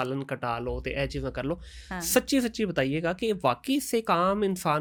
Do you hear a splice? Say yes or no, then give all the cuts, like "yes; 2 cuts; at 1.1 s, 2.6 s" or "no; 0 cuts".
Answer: no; 0 cuts